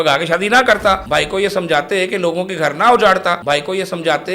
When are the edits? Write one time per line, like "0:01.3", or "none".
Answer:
0:01.0
0:03.4